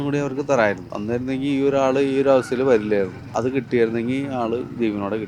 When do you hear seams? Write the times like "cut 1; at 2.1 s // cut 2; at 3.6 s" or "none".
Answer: cut 1; at 0.9 s // cut 2; at 3.2 s

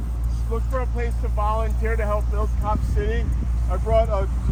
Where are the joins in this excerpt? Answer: none

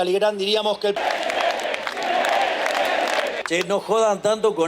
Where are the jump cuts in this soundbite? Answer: cut 1; at 1.0 s // cut 2; at 3.4 s

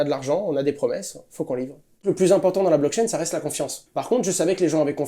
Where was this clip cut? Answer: cut 1; at 2.0 s // cut 2; at 3.7 s

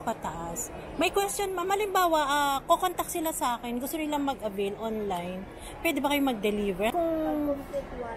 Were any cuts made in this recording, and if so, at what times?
cut 1; at 6.9 s

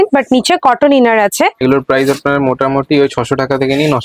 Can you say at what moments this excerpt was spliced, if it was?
cut 1; at 1.6 s

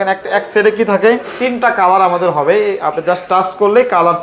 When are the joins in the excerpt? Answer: cut 1; at 1.3 s

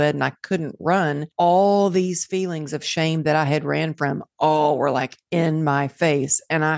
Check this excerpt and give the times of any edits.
cut 1; at 1.2 s

